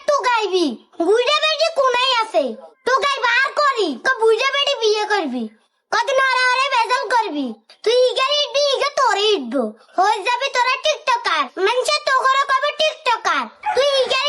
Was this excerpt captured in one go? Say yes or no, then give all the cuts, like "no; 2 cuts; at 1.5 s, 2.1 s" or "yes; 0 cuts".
yes; 0 cuts